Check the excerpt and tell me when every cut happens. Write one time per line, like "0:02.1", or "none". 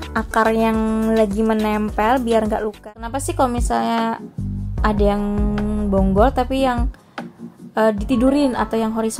0:02.7